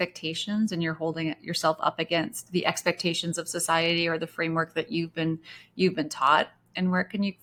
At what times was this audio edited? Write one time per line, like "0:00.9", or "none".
none

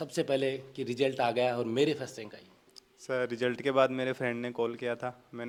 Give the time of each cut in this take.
none

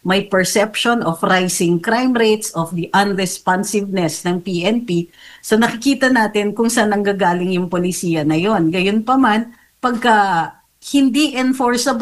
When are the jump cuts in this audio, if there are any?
none

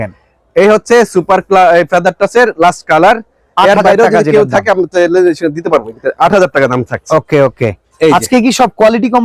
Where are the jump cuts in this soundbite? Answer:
none

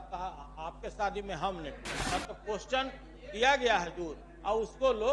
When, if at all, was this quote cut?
0:01.9

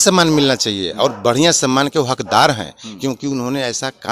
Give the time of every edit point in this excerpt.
none

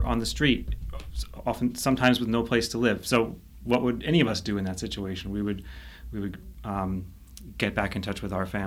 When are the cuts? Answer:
none

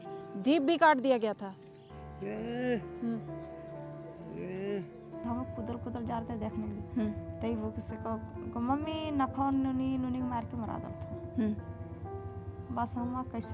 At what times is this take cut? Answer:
0:05.2

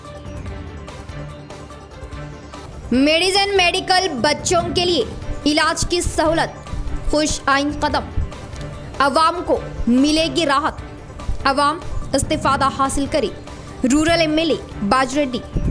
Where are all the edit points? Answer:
0:01.0

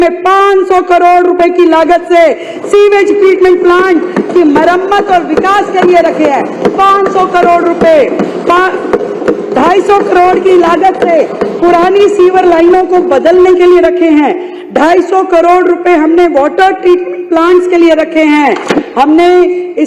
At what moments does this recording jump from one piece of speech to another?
none

